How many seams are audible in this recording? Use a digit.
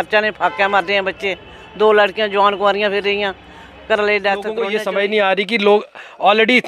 1